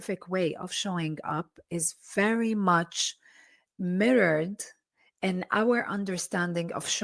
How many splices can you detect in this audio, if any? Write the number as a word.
zero